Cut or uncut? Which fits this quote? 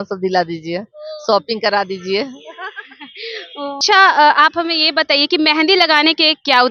uncut